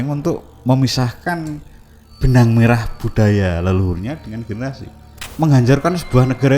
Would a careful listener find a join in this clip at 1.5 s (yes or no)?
no